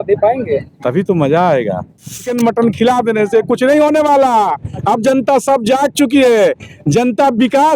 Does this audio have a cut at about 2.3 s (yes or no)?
yes